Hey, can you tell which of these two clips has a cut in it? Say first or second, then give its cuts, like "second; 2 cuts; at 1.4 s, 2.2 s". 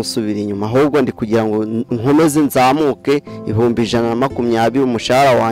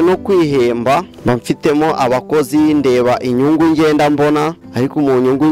second; 2 cuts; at 1.1 s, 4.6 s